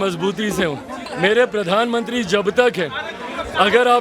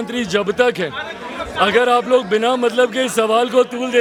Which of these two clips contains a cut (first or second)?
first